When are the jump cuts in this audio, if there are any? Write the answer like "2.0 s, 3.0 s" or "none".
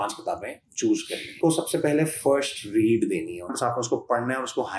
1.4 s, 3.5 s